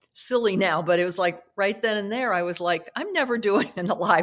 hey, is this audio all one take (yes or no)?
yes